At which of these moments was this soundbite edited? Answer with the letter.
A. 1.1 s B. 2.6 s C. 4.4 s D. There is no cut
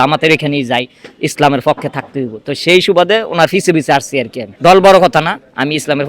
C